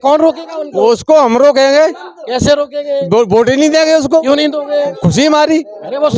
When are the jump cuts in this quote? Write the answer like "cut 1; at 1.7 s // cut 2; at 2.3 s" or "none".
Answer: none